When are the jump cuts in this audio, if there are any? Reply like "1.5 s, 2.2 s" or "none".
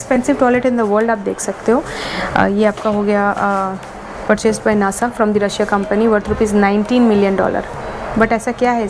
none